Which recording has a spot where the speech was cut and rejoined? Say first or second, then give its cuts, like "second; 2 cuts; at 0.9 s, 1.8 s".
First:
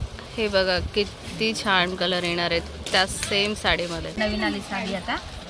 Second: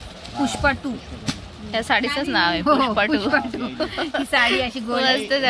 first; 1 cut; at 4.1 s